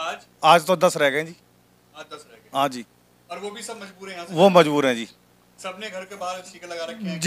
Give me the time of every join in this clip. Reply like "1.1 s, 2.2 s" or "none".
none